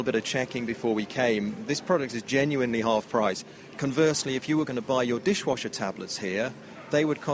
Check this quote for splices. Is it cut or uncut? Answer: uncut